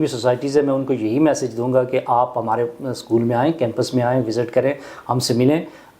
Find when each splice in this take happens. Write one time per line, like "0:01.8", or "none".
none